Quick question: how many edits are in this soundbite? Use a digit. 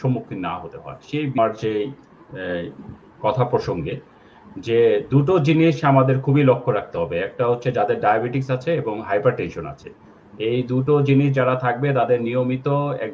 1